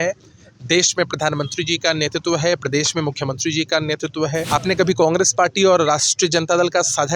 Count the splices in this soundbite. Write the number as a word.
one